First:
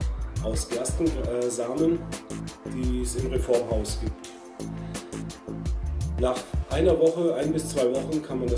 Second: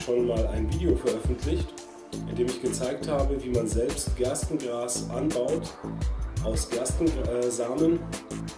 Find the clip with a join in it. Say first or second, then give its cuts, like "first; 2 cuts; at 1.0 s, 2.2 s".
second; 1 cut; at 3.4 s